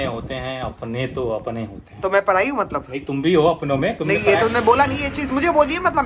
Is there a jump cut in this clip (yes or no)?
no